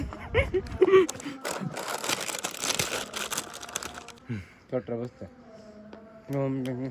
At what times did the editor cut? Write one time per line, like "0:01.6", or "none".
0:04.1